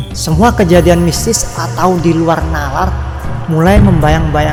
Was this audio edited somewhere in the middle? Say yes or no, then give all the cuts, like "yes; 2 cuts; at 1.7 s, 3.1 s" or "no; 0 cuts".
no; 0 cuts